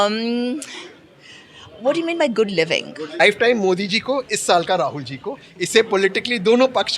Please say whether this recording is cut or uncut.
cut